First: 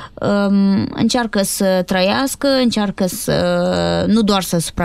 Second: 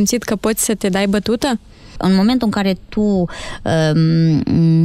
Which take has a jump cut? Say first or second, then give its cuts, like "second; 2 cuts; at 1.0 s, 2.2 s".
second; 1 cut; at 1.9 s